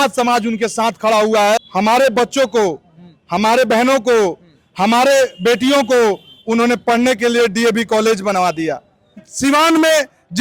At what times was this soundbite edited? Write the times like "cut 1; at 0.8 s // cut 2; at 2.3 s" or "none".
cut 1; at 1.7 s // cut 2; at 9.2 s